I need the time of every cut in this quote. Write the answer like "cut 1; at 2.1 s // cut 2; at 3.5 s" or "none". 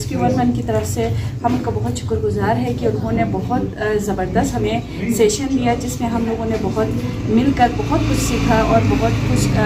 none